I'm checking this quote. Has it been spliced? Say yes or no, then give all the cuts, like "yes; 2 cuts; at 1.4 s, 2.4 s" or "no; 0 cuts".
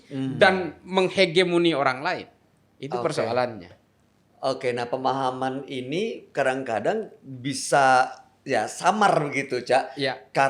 no; 0 cuts